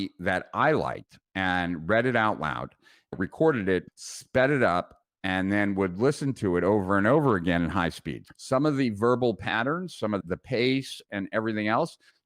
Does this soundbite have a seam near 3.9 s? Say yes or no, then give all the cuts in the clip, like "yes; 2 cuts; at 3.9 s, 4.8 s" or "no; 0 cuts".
yes; 3 cuts; at 3.1 s, 3.9 s, 8.2 s